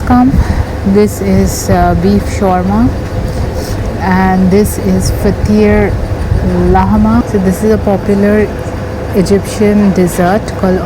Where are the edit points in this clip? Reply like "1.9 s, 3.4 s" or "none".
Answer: 7.3 s